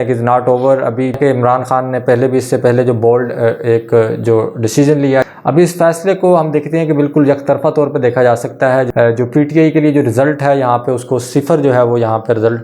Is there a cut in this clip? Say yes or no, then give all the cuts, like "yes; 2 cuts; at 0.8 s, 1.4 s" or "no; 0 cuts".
yes; 3 cuts; at 1.2 s, 5.3 s, 8.9 s